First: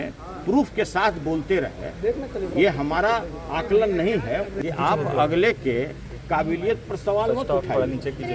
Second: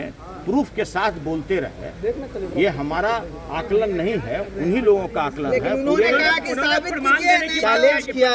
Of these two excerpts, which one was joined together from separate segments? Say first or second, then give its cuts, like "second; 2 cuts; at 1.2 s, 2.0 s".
first; 1 cut; at 4.5 s